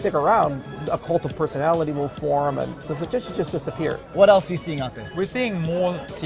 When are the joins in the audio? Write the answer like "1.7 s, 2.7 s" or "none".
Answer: 2.8 s, 4.1 s, 5.0 s